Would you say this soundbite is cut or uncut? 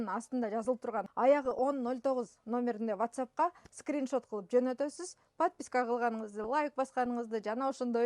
cut